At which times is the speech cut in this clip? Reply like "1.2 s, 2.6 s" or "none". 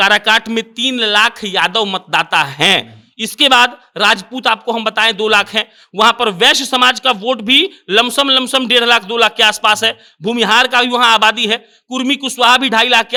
none